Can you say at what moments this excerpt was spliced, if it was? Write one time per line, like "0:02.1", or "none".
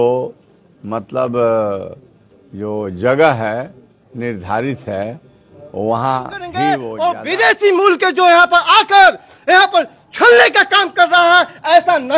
0:06.4